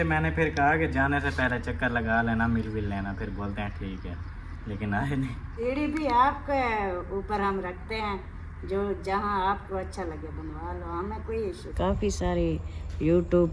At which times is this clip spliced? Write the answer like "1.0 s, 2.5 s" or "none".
5.6 s, 11.7 s